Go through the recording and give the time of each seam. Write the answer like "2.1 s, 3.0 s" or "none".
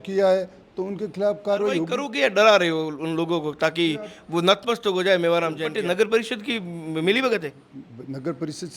1.9 s, 5.7 s

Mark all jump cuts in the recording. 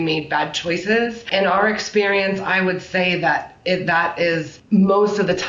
1.3 s, 4.5 s

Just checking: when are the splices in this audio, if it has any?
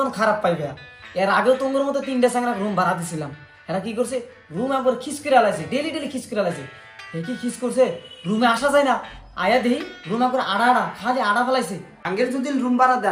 12.0 s

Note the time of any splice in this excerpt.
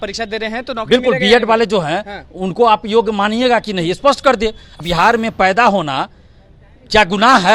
4.7 s

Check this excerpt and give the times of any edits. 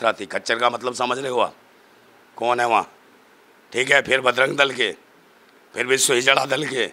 none

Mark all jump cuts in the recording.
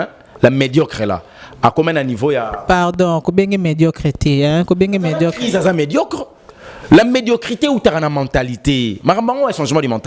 none

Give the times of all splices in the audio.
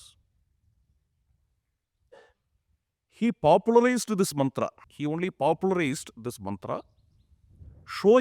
4.8 s

